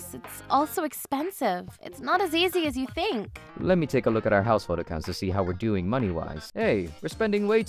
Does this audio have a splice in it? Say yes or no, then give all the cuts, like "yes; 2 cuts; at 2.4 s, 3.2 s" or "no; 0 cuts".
no; 0 cuts